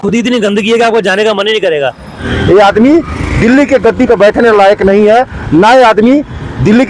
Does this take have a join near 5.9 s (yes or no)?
no